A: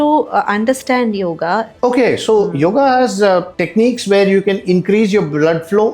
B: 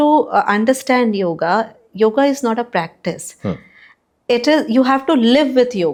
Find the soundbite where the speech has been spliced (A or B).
A